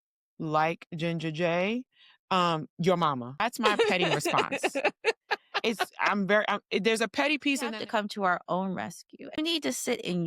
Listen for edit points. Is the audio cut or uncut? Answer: cut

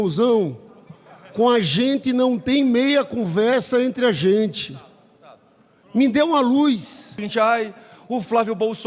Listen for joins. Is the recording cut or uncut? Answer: cut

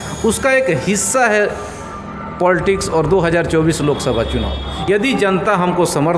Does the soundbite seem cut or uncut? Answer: uncut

